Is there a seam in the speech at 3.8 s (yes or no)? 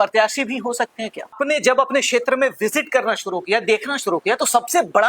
no